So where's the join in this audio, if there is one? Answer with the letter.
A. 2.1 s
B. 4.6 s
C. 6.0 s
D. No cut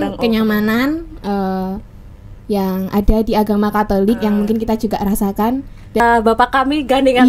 C